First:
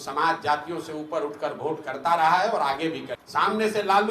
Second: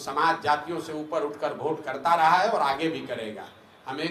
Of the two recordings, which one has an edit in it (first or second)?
first